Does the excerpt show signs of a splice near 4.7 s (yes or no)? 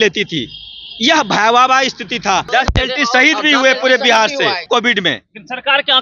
yes